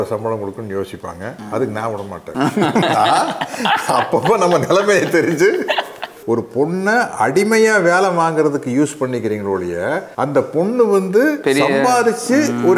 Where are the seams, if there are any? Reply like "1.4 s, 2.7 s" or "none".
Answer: 6.1 s